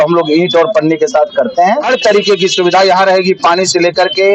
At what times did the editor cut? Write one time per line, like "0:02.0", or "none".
0:01.8